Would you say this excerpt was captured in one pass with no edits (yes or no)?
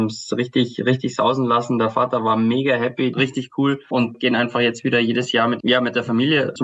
no